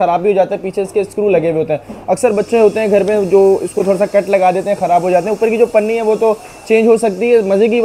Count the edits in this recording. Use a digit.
0